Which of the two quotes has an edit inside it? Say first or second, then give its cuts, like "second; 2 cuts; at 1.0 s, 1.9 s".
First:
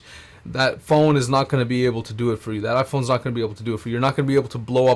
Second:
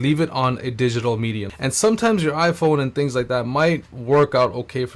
second; 1 cut; at 1.5 s